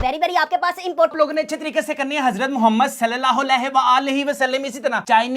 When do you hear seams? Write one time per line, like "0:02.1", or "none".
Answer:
0:01.1